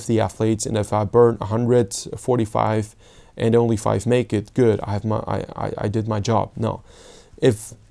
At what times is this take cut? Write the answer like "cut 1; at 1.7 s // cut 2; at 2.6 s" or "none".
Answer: none